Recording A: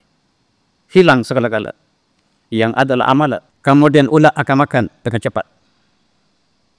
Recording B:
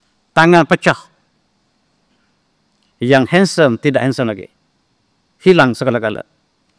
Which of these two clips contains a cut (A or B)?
A